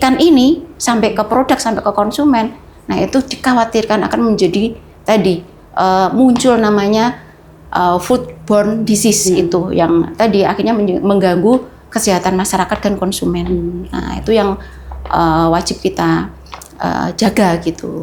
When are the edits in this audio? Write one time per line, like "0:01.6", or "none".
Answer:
none